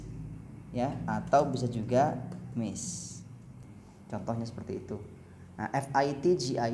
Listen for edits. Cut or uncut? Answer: cut